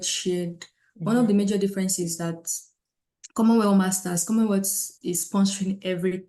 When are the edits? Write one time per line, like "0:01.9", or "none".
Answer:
none